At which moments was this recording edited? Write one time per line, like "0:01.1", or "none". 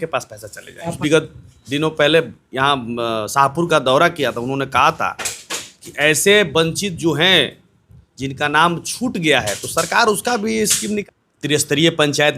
0:00.9
0:11.0